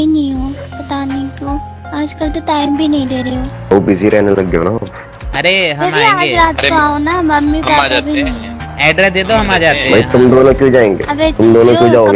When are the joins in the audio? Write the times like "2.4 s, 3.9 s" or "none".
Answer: 3.7 s